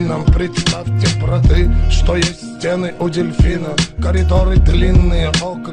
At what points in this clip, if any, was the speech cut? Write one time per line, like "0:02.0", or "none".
none